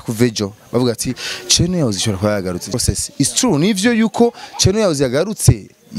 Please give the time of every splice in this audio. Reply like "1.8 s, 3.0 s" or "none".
2.7 s